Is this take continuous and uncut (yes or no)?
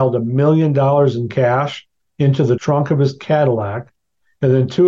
no